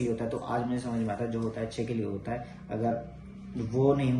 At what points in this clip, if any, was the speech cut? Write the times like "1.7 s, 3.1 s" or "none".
none